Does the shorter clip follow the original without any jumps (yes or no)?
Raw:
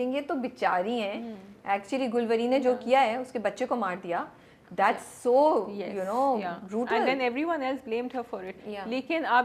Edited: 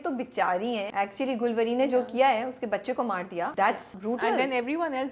no